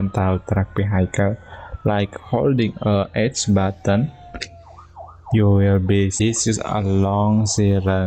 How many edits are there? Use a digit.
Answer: 1